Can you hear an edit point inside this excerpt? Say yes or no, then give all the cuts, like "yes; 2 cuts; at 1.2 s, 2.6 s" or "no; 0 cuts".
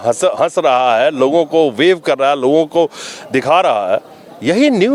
no; 0 cuts